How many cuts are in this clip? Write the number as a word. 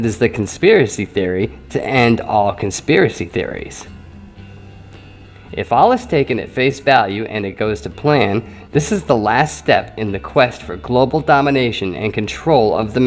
one